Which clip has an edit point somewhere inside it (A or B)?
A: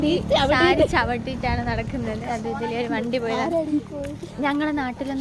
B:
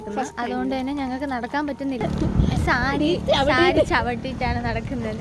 B